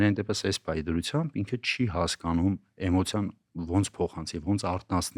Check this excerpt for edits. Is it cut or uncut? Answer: uncut